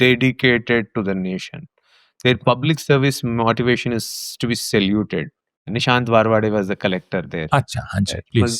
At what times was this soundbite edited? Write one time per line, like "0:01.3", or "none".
0:05.7